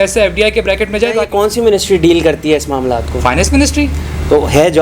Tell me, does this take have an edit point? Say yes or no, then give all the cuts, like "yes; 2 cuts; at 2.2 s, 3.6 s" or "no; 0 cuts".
yes; 1 cut; at 1.2 s